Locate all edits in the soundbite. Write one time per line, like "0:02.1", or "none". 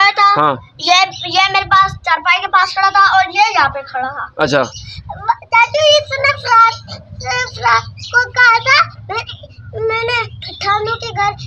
none

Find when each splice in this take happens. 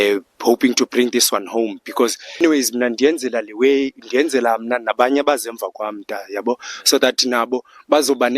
0:02.4

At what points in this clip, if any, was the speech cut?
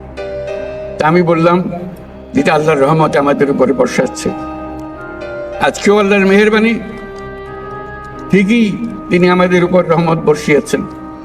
0:00.9

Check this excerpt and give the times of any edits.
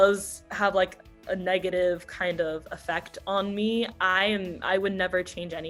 none

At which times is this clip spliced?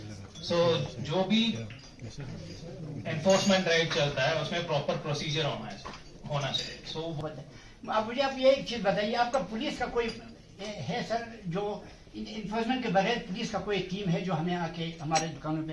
0:07.2

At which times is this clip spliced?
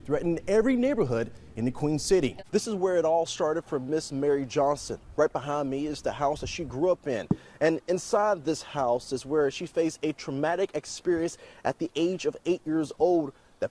0:02.4

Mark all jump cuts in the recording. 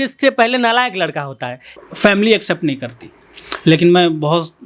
0:01.7

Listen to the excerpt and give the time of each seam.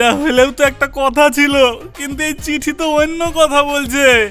none

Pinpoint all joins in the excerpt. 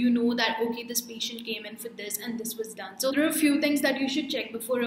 0:03.1

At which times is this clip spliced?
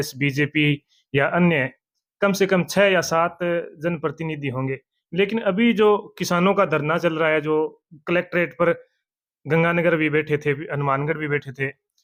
none

